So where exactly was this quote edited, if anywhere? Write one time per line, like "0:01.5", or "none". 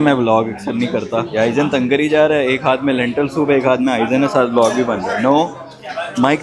0:01.3